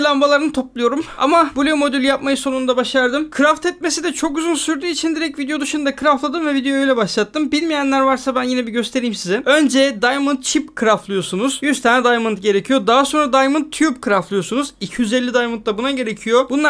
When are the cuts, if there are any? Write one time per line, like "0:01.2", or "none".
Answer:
none